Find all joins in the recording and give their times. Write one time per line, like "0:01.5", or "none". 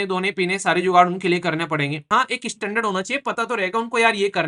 0:02.0